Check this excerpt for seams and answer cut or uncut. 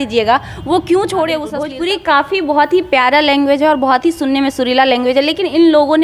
cut